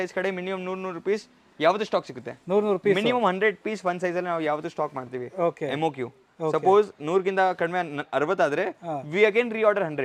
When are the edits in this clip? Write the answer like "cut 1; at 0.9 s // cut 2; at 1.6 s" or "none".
none